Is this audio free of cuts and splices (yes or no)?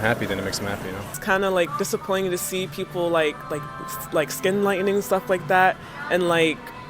no